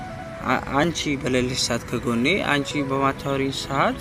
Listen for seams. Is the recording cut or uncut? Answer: uncut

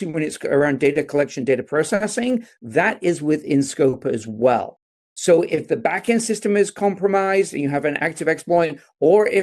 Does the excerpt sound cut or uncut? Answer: uncut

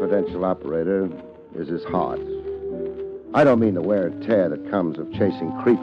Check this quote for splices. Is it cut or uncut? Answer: cut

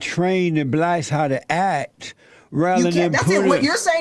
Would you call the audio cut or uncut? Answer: uncut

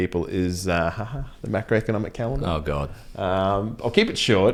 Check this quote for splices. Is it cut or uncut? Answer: uncut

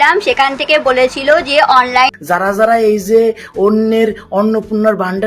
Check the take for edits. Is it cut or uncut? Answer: cut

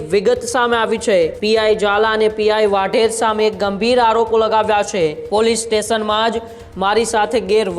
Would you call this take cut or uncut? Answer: cut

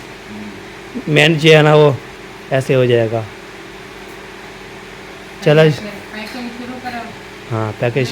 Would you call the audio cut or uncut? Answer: uncut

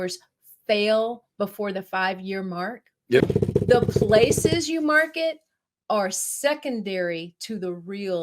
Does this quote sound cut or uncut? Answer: cut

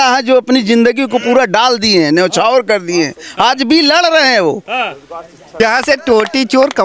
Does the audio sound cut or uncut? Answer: cut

